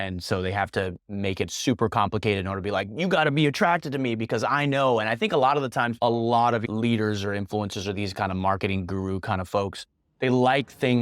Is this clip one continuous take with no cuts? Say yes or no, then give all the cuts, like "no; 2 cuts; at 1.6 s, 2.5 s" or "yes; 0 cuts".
no; 2 cuts; at 6.0 s, 6.6 s